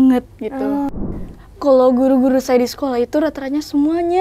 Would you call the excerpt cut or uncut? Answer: cut